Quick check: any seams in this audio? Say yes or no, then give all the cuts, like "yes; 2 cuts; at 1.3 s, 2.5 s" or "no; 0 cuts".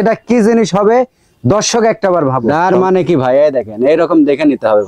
yes; 1 cut; at 2.4 s